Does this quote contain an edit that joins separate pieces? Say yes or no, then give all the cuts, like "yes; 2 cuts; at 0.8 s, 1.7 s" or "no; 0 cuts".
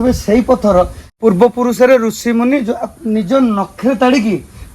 yes; 1 cut; at 1.0 s